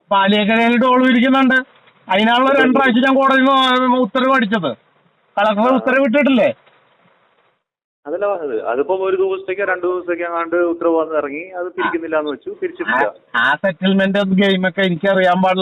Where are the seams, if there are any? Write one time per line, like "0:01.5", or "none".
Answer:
none